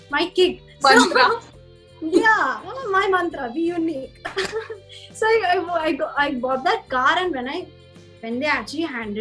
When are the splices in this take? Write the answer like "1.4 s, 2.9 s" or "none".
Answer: none